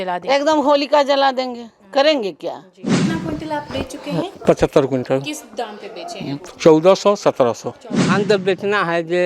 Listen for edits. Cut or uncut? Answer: cut